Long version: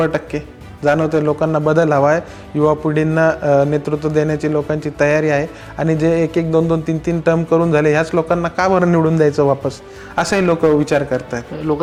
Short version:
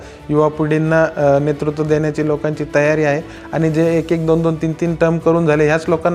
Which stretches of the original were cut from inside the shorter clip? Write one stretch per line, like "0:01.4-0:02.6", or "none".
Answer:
none